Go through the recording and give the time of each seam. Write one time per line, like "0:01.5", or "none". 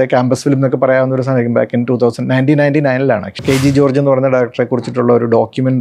0:03.4

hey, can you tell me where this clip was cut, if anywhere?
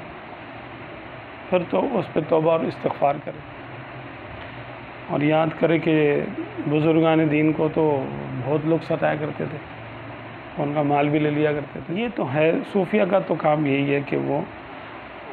0:03.2
0:11.8

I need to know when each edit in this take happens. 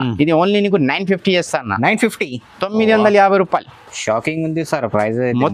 none

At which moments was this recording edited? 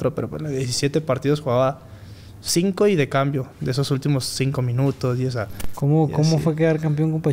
0:05.7

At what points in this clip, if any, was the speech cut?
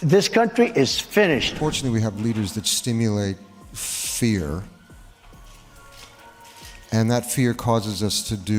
0:01.5

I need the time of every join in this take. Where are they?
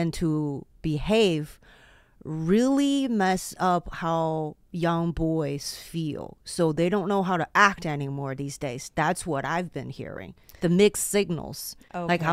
none

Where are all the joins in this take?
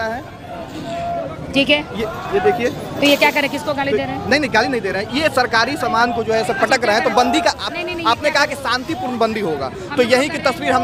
none

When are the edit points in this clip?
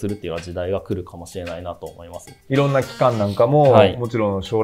0:02.5

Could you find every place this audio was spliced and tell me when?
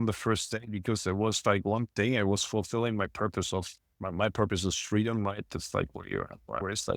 none

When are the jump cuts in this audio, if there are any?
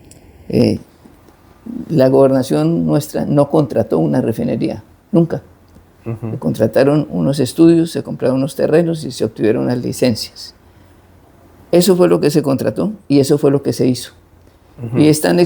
none

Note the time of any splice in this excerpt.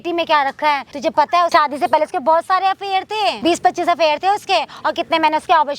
0:01.4
0:03.4

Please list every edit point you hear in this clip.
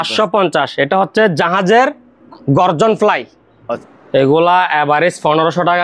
0:03.7

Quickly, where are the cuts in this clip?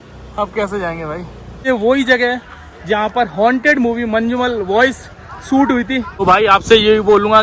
0:01.6
0:06.1

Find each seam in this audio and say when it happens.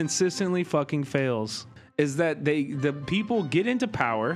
0:01.7

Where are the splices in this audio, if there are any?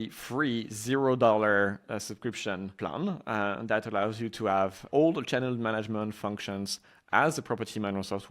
0:04.8

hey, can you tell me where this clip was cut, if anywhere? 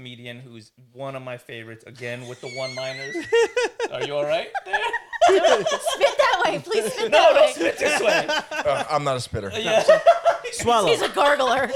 none

